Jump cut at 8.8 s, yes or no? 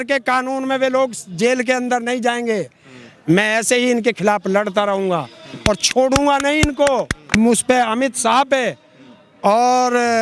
no